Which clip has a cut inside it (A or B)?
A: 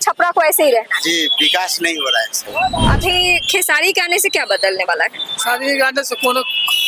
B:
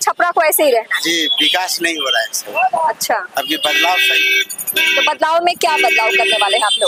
A